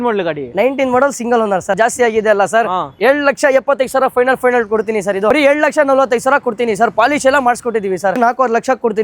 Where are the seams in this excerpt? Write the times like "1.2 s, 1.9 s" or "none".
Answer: 1.7 s, 5.3 s, 8.2 s